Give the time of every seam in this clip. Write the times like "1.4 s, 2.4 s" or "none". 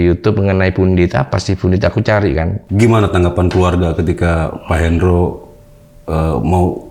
2.6 s